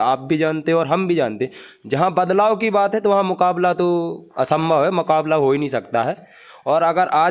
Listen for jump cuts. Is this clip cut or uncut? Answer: uncut